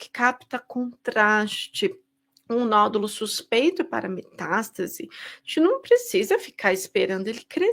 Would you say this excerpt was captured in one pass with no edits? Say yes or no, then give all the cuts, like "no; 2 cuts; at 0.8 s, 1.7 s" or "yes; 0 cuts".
yes; 0 cuts